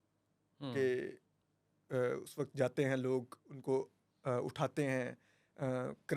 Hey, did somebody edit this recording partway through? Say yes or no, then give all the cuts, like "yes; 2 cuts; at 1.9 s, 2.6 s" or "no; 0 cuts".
no; 0 cuts